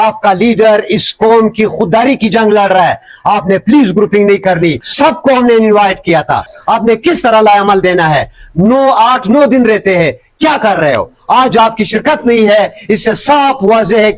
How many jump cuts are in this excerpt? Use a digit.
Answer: 2